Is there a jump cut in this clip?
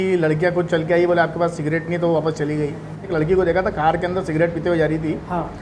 yes; 1 cut; at 3.1 s

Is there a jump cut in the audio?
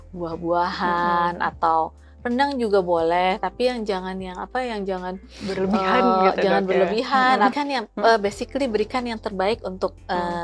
yes; 1 cut; at 7.5 s

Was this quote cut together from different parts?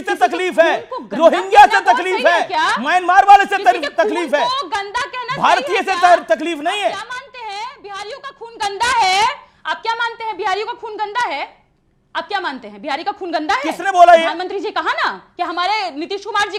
no; 0 cuts

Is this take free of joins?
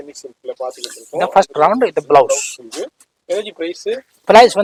yes; 0 cuts

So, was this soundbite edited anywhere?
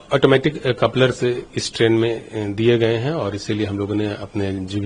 no; 0 cuts

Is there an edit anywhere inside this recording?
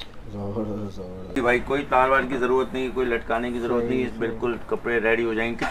yes; 1 cut; at 1.4 s

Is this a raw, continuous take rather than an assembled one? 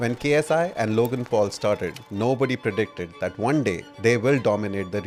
yes; 0 cuts

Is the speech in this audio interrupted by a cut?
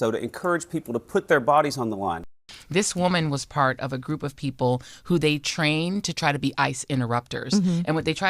yes; 1 cut; at 2.2 s

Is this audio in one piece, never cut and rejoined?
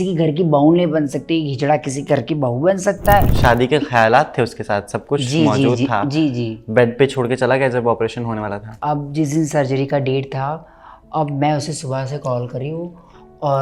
no; 2 cuts; at 3.3 s, 8.8 s

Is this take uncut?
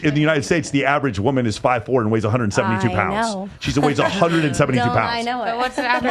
yes; 0 cuts

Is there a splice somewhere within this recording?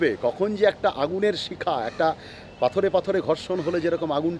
no; 0 cuts

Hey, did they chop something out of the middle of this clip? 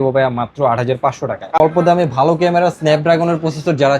yes; 1 cut; at 1.6 s

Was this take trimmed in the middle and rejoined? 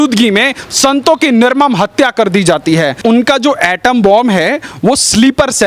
yes; 1 cut; at 3.0 s

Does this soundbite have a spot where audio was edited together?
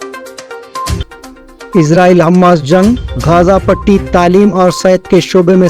yes; 1 cut; at 1.0 s

